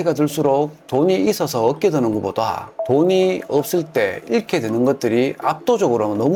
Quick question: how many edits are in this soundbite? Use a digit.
0